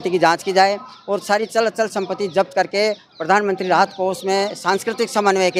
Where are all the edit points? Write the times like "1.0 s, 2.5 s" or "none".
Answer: none